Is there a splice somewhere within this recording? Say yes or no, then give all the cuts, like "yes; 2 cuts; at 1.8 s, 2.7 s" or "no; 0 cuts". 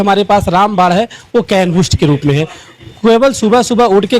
no; 0 cuts